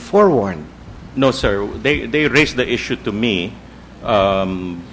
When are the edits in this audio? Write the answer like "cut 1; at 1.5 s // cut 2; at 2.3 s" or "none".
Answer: cut 1; at 3.5 s